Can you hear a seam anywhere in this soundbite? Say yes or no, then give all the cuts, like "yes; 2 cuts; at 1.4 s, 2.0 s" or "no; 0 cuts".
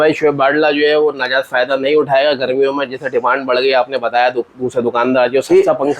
no; 0 cuts